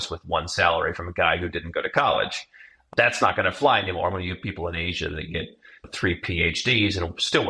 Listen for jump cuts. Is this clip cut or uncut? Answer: cut